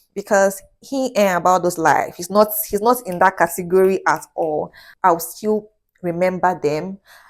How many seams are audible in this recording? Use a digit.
1